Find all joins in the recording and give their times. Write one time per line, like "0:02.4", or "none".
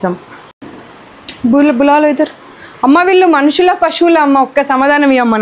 none